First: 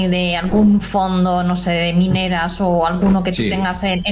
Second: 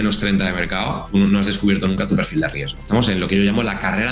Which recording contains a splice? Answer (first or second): second